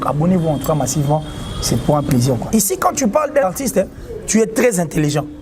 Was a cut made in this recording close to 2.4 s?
yes; 2 cuts; at 2.4 s, 3.4 s

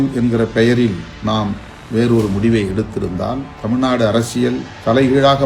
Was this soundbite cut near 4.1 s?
no; 1 cut; at 1.1 s

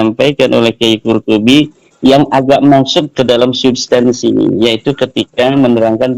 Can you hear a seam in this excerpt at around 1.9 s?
no; 0 cuts

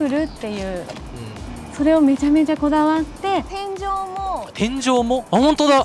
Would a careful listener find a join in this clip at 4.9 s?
no; 1 cut; at 3.5 s

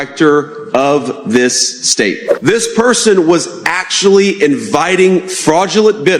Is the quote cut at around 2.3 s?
yes; 1 cut; at 2.3 s

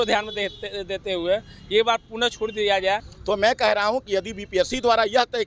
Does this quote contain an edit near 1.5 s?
no; 1 cut; at 3.1 s

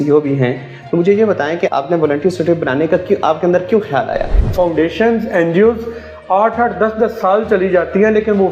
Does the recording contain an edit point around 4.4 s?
yes; 1 cut; at 4.4 s

